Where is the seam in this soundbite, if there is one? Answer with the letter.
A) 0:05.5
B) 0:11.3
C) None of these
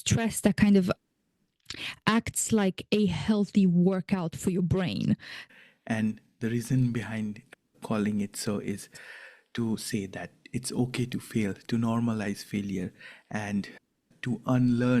A